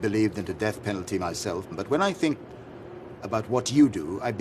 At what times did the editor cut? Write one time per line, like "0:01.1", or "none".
0:01.7